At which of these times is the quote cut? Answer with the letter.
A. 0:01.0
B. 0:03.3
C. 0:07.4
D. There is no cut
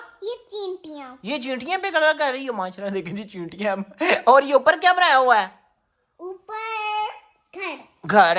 D